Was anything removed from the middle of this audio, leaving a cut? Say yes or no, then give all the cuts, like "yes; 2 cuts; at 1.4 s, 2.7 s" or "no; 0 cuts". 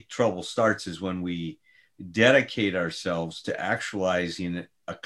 no; 0 cuts